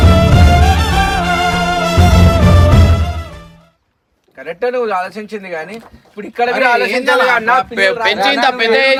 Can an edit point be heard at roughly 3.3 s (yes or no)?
no